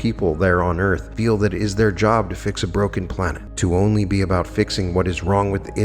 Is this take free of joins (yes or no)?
no